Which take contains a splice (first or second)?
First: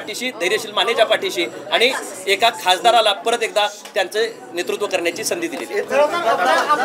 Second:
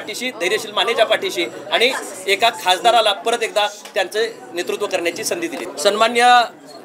second